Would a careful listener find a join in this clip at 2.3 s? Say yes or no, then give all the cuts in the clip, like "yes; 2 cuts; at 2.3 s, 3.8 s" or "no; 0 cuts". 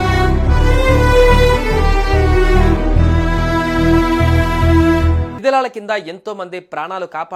yes; 1 cut; at 2.3 s